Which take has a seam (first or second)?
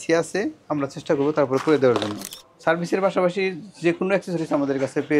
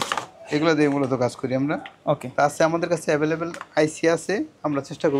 first